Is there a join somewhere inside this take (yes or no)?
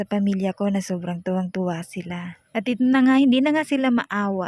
yes